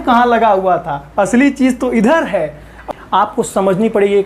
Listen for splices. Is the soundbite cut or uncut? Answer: cut